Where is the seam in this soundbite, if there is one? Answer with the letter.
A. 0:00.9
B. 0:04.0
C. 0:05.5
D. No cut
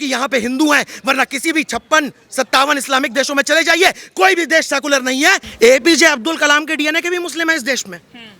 C